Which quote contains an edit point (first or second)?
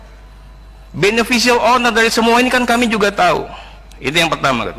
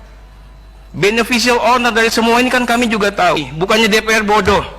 second